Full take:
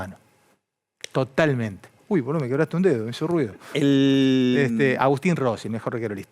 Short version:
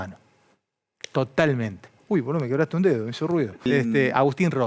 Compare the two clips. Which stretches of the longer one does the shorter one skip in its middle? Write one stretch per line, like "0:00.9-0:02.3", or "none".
0:03.7-0:04.5